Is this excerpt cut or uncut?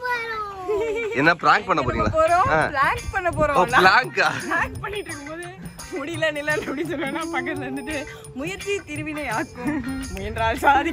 uncut